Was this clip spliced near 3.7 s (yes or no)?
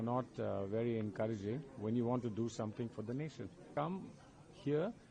yes